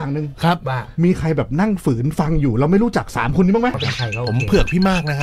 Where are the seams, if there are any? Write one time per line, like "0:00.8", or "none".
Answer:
0:03.8